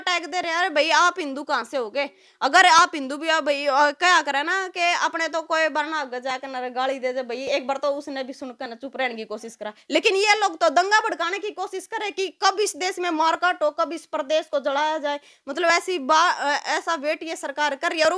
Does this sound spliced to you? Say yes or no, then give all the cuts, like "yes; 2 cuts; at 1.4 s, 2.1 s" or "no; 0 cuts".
no; 0 cuts